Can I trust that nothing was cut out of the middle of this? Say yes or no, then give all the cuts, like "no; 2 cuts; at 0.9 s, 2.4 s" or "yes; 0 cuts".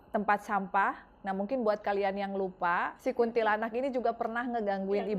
no; 1 cut; at 2.9 s